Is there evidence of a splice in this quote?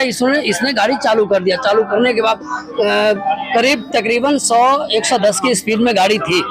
no; 0 cuts

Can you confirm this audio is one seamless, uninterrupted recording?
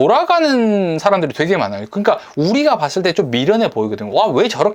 yes; 0 cuts

